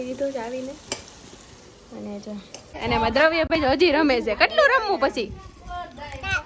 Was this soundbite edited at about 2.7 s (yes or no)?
yes